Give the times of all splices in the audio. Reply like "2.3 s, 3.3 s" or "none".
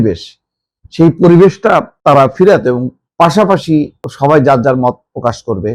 1.9 s, 3.0 s, 4.0 s

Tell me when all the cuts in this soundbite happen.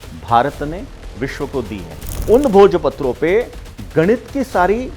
2.1 s

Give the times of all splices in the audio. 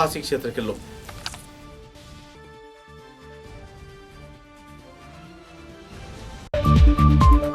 none

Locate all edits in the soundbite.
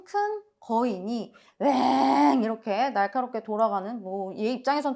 1.4 s

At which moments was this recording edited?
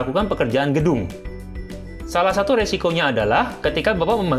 none

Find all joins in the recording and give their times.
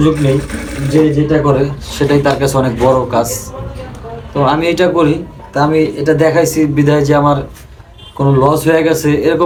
none

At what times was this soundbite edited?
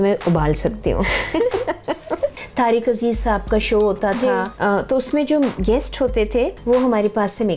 2.4 s, 4.5 s, 6.6 s

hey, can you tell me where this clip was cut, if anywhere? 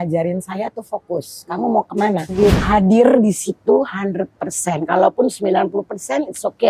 2.3 s

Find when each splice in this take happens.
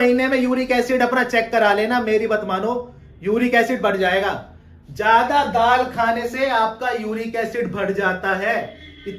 none

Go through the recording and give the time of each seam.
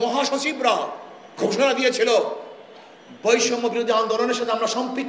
none

